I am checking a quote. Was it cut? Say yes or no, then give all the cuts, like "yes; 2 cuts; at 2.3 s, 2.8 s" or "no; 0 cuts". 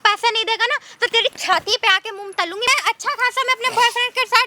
yes; 1 cut; at 2.7 s